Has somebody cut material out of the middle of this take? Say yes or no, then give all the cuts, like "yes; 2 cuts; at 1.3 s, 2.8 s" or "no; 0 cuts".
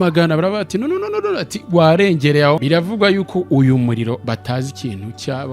yes; 1 cut; at 2.6 s